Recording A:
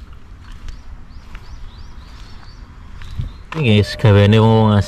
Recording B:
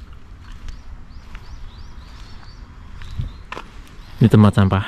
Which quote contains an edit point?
A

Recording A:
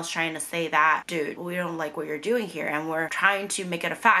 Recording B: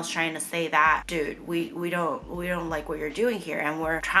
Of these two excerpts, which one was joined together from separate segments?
A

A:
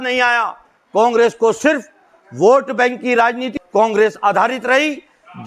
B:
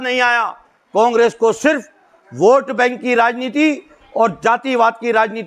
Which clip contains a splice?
A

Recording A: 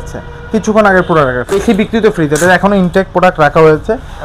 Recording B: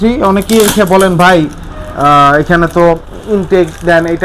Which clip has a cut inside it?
A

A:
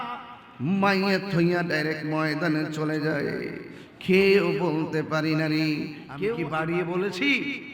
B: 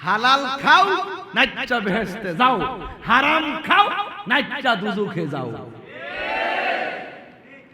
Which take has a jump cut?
A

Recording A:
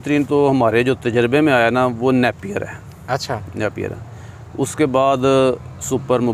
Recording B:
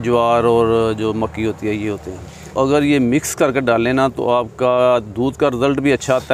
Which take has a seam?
B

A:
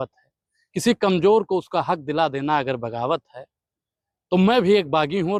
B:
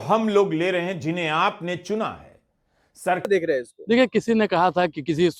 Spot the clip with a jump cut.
B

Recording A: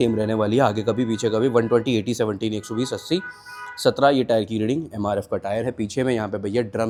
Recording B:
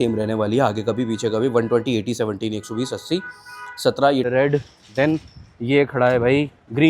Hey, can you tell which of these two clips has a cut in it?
B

